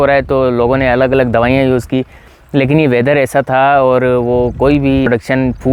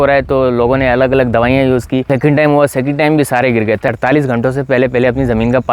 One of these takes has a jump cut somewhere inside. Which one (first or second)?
second